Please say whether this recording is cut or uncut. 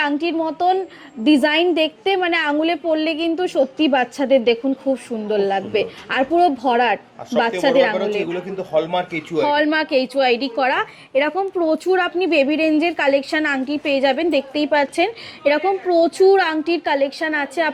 uncut